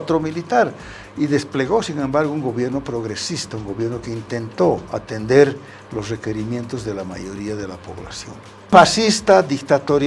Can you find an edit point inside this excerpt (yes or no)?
yes